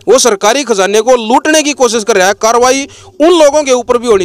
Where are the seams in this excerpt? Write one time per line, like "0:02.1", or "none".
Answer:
none